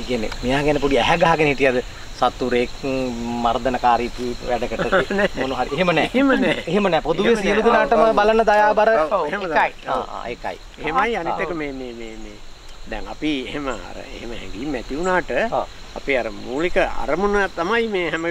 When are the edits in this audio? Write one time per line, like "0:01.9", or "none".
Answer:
none